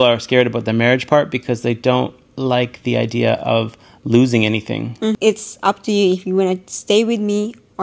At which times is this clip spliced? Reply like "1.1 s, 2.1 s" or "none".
5.2 s